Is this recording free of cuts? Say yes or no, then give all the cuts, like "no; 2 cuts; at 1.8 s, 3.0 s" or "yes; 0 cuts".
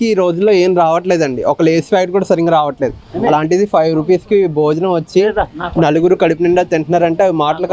yes; 0 cuts